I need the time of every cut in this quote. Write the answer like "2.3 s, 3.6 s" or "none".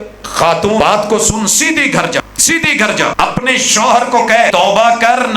0.8 s, 2.2 s, 3.1 s, 4.5 s